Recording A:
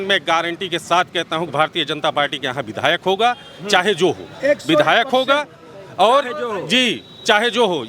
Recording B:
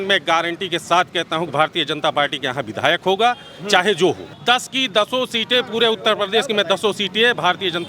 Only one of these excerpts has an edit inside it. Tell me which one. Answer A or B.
B